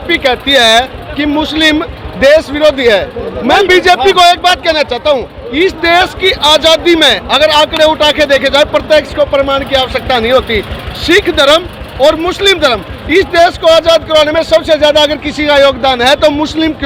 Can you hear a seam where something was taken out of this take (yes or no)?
no